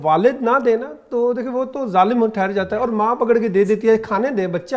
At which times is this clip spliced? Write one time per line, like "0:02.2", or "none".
none